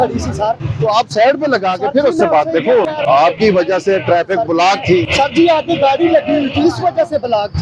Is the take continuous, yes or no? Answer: yes